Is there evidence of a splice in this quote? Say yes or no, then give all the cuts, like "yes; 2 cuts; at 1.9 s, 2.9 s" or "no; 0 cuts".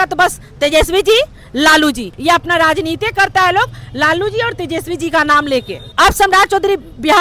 yes; 2 cuts; at 2.1 s, 5.8 s